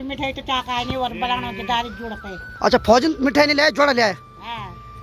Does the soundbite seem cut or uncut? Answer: uncut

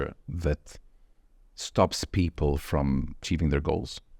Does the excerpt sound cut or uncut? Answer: cut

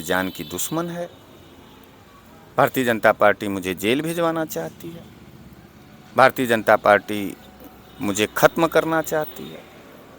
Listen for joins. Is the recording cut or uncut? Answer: uncut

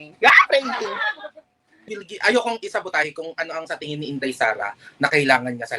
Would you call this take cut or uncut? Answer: cut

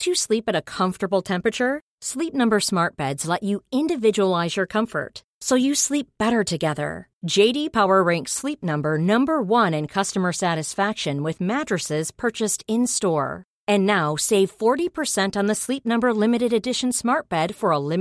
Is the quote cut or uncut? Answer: uncut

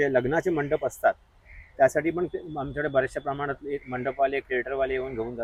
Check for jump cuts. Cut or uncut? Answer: uncut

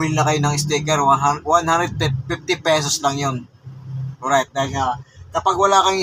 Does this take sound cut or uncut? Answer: uncut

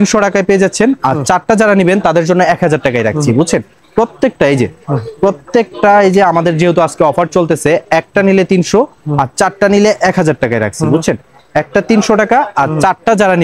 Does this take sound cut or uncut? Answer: uncut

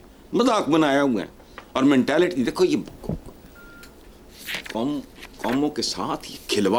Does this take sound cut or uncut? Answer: uncut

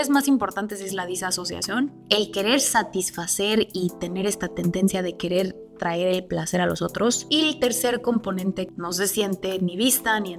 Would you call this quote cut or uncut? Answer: cut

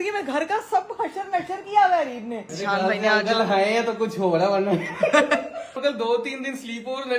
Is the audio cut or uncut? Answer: cut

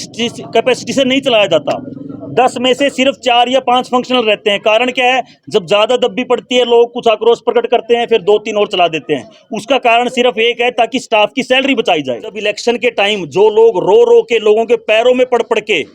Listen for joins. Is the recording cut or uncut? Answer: cut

